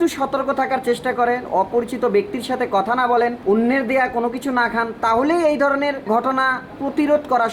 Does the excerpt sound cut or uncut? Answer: cut